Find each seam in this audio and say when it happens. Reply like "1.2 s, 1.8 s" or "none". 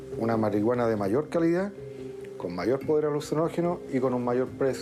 none